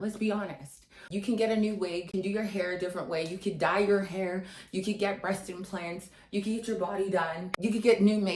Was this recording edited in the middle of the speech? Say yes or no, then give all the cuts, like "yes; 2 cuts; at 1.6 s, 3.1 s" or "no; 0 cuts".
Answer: yes; 1 cut; at 2.1 s